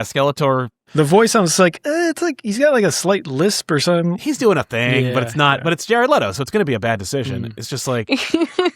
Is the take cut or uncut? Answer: cut